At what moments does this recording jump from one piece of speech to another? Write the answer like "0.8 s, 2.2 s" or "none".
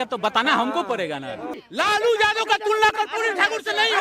1.6 s